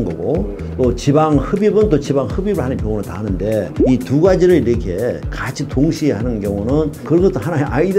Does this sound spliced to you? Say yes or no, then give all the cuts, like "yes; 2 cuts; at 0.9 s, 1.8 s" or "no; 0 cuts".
no; 0 cuts